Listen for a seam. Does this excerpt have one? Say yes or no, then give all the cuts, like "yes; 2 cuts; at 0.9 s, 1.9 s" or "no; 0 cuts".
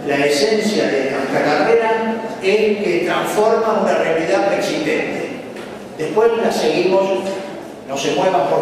yes; 1 cut; at 4.6 s